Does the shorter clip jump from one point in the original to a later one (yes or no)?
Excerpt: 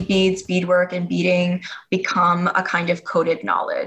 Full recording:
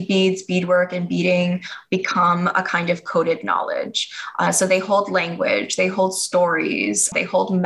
no